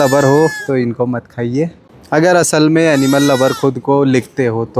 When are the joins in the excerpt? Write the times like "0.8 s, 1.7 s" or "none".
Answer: 1.9 s